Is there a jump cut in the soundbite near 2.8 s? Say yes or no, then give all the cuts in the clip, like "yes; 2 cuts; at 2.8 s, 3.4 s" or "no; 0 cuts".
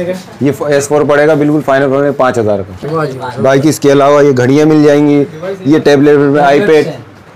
yes; 1 cut; at 2.8 s